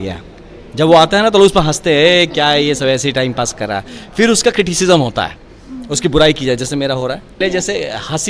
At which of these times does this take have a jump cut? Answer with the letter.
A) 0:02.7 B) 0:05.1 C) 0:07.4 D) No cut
C